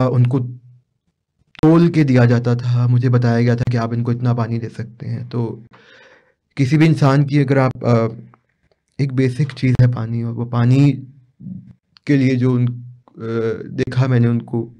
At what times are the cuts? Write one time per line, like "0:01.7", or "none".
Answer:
none